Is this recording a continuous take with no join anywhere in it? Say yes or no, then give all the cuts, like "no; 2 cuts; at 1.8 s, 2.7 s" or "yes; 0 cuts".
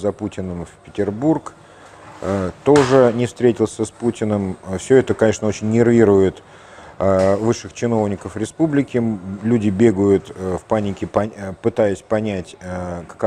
yes; 0 cuts